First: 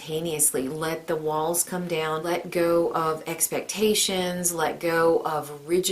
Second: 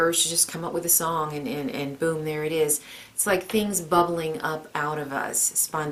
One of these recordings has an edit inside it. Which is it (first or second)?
first